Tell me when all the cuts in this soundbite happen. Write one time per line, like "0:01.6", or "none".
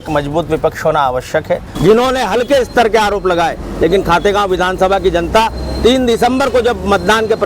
0:01.7

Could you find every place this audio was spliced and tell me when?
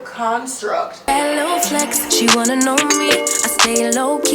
0:01.1

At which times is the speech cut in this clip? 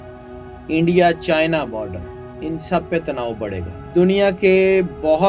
0:03.8

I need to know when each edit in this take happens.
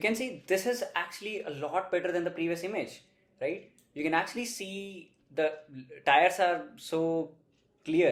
none

